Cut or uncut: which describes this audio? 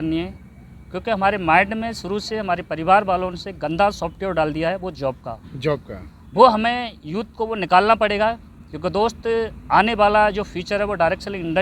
uncut